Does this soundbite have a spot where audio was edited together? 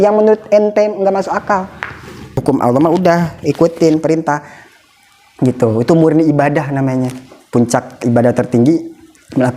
yes; 1 cut; at 2.4 s

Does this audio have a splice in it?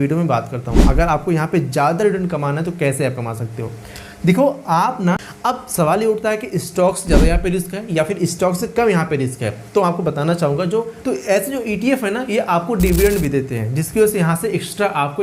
yes; 2 cuts; at 5.3 s, 10.9 s

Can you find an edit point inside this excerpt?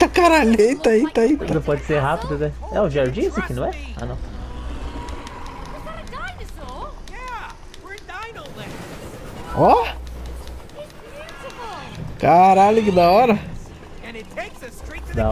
no; 0 cuts

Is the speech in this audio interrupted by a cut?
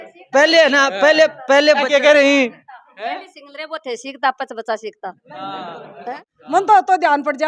yes; 1 cut; at 6.6 s

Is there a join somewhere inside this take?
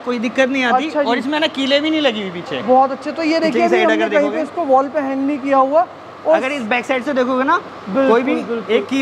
no; 0 cuts

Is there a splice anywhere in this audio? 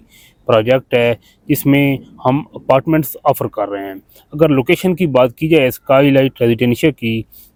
no; 0 cuts

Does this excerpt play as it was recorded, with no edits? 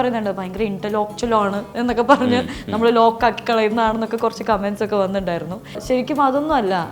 no; 1 cut; at 5.8 s

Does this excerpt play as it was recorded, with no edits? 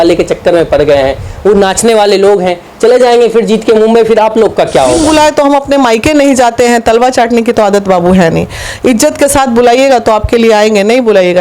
no; 1 cut; at 5.0 s

